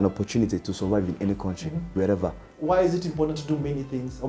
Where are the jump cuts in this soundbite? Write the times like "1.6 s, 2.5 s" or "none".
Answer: 2.5 s